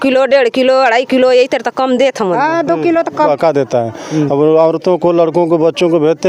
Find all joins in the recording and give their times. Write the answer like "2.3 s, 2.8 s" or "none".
3.3 s